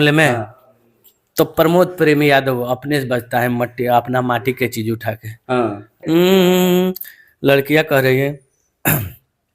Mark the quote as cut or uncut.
cut